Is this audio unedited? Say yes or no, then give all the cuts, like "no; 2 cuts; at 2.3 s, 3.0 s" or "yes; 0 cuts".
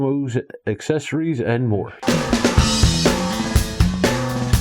no; 1 cut; at 1.9 s